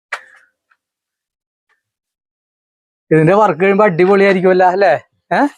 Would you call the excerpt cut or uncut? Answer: uncut